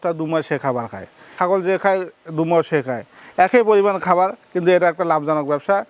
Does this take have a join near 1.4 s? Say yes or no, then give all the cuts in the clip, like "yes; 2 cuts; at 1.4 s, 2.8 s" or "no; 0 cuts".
yes; 1 cut; at 1.4 s